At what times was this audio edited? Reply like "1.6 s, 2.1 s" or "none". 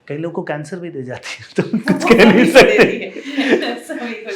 none